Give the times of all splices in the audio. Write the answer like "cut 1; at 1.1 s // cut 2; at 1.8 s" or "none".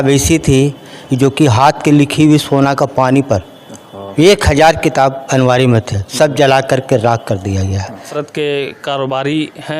cut 1; at 8.1 s